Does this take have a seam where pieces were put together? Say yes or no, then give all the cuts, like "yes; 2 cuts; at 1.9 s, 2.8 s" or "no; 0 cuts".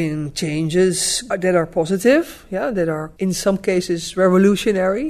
yes; 2 cuts; at 1.2 s, 3.1 s